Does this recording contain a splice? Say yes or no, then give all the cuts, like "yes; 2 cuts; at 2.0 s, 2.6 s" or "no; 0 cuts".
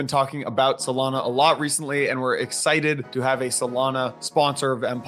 yes; 2 cuts; at 3.1 s, 4.2 s